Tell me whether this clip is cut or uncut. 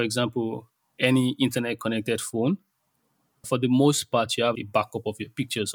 cut